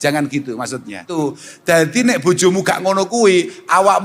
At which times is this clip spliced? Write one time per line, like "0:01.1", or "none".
0:01.1

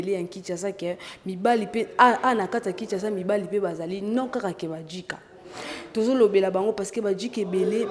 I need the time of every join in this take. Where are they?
none

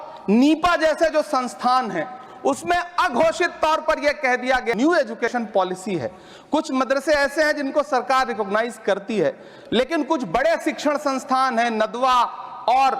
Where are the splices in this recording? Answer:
0:04.7

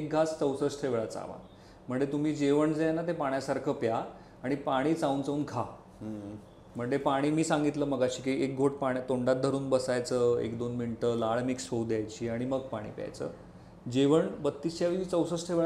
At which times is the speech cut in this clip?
none

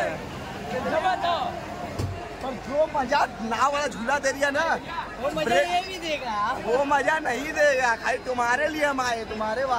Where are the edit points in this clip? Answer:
0:02.0

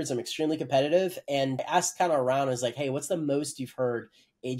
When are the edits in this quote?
0:01.6

